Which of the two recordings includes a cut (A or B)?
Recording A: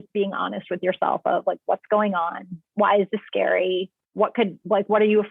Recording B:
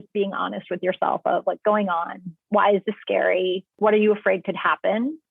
B